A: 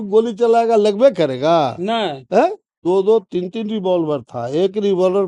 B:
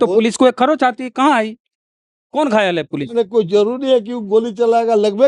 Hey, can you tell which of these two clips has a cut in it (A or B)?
A